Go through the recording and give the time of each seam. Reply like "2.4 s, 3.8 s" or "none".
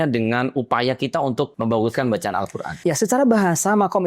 1.5 s, 2.6 s